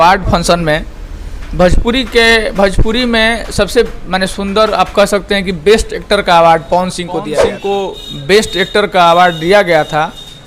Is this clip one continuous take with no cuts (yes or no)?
no